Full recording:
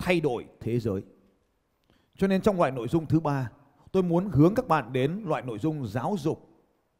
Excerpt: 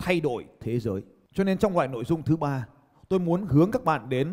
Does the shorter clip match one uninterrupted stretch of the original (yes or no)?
no